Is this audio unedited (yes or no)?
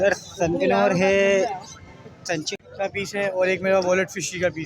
no